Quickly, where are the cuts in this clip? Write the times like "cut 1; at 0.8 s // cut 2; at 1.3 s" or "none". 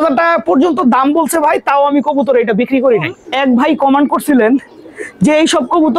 cut 1; at 3.2 s